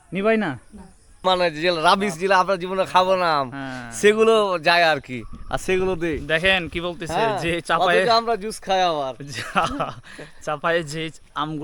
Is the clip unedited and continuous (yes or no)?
no